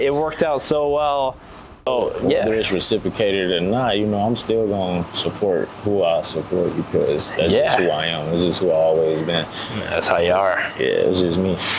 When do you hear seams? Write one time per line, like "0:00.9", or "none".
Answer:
0:01.9